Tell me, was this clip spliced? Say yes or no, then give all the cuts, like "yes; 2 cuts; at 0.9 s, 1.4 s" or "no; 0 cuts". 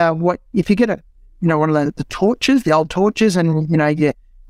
no; 0 cuts